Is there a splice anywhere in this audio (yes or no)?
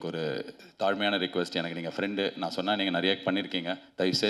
no